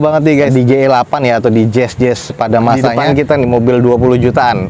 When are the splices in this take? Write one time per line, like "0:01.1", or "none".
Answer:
0:02.9